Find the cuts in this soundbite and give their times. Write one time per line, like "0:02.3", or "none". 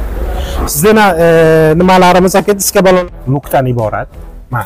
0:03.0